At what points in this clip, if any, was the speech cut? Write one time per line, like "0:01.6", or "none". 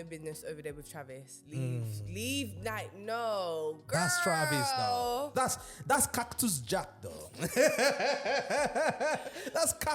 0:05.3